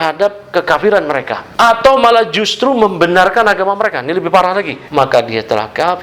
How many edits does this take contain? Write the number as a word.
two